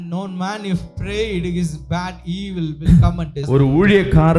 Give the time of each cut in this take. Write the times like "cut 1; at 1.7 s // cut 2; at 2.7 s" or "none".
cut 1; at 3.4 s

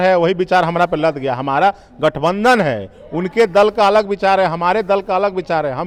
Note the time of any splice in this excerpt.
none

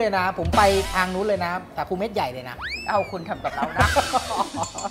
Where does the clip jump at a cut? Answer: none

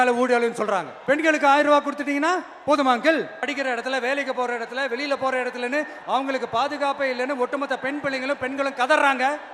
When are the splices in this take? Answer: cut 1; at 0.9 s // cut 2; at 3.5 s

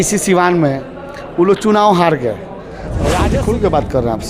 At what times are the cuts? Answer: cut 1; at 3.2 s

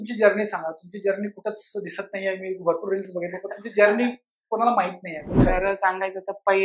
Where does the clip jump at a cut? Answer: cut 1; at 5.4 s

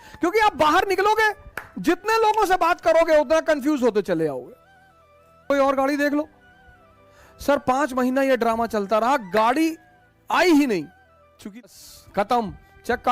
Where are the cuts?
cut 1; at 5.5 s // cut 2; at 11.7 s

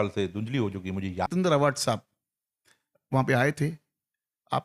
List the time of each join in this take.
cut 1; at 1.3 s

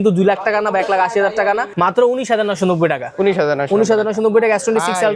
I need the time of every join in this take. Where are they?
cut 1; at 1.7 s

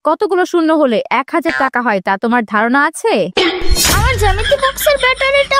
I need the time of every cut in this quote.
cut 1; at 3.9 s

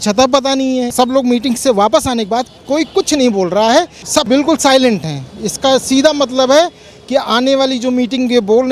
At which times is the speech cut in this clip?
cut 1; at 0.9 s // cut 2; at 4.1 s

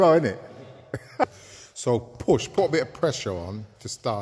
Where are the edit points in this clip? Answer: cut 1; at 1.3 s

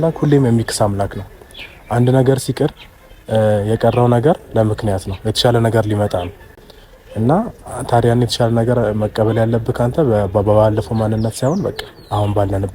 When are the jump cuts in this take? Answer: none

